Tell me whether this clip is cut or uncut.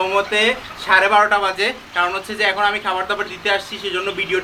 uncut